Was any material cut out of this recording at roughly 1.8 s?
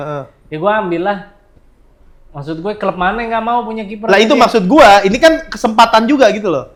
no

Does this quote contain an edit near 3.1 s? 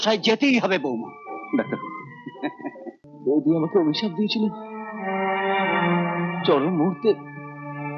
yes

